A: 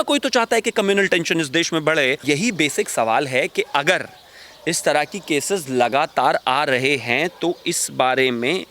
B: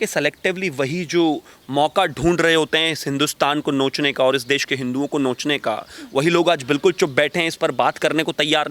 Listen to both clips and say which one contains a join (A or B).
A